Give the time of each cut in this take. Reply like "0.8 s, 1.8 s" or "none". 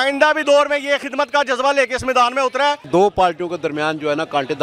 2.9 s